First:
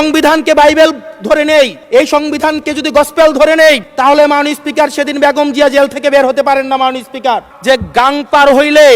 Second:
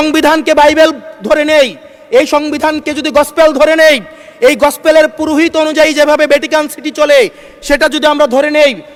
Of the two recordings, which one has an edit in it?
first; 3 cuts; at 1.8 s, 3.9 s, 7.5 s

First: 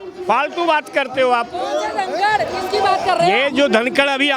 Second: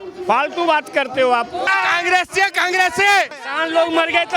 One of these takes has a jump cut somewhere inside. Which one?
second; 2 cuts; at 1.7 s, 3.4 s

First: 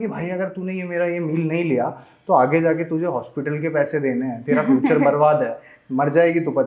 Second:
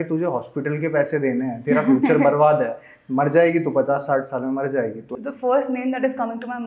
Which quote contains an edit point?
second; 1 cut; at 5.0 s

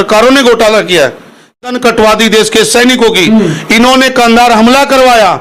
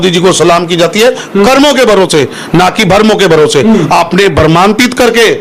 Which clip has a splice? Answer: first; 1 cut; at 1.7 s

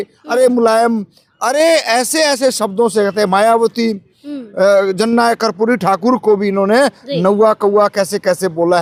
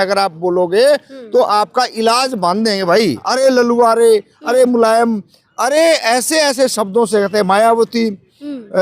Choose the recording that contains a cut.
second; 1 cut; at 3.3 s

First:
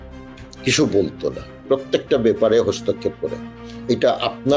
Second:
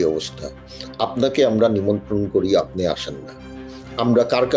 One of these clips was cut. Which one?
first; 1 cut; at 1.6 s

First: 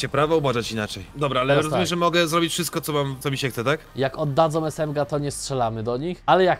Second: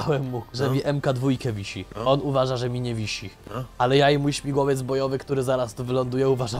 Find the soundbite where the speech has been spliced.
first; 2 cuts; at 1.0 s, 3.2 s

